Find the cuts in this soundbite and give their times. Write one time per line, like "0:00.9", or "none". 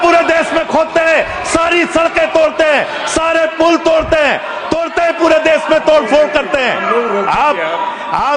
none